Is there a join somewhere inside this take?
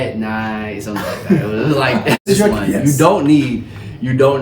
yes; 1 cut; at 2.2 s

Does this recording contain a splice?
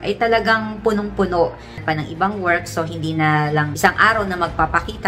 yes; 1 cut; at 1.8 s

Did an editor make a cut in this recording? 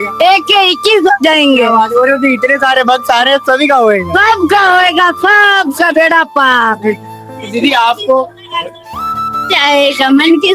no; 0 cuts

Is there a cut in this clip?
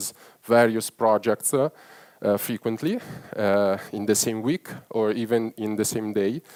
no; 0 cuts

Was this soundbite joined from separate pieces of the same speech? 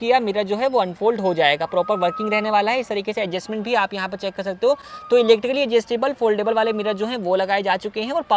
no; 0 cuts

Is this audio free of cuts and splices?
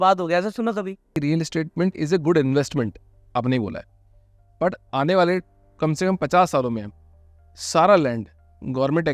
no; 1 cut; at 1.2 s

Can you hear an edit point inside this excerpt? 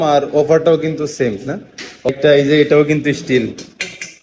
yes; 1 cut; at 2.1 s

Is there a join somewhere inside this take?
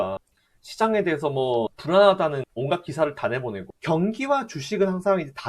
yes; 1 cut; at 3.7 s

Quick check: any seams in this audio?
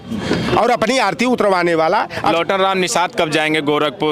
yes; 1 cut; at 2.3 s

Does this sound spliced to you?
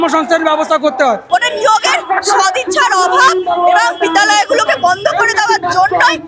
yes; 1 cut; at 1.2 s

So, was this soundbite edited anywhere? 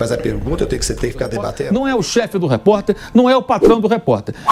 yes; 1 cut; at 1.6 s

